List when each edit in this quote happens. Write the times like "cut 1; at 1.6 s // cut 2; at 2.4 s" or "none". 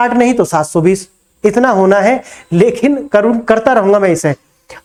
none